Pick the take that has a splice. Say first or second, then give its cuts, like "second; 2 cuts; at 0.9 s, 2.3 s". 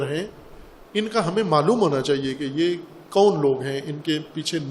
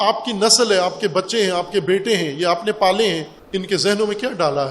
second; 1 cut; at 3.3 s